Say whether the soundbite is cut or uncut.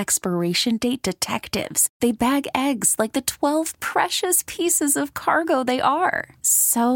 uncut